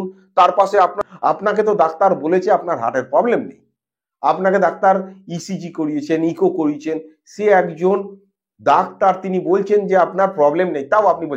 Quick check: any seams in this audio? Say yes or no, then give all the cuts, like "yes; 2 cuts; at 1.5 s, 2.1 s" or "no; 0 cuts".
yes; 1 cut; at 1.0 s